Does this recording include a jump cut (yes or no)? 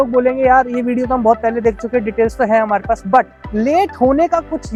no